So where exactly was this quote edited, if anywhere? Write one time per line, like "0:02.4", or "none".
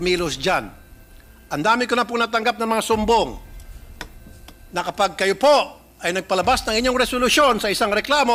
none